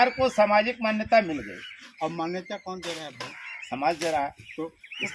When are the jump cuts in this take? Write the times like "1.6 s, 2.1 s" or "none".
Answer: none